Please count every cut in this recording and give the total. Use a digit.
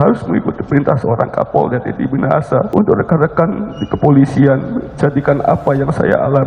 1